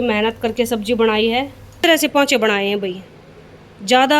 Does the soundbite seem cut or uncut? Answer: cut